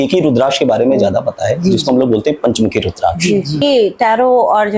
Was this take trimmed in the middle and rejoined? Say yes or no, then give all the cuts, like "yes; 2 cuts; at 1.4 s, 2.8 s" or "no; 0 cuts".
yes; 1 cut; at 3.6 s